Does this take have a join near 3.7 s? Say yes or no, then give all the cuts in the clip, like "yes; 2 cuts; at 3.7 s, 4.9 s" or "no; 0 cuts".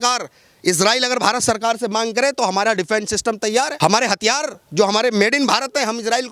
yes; 1 cut; at 3.7 s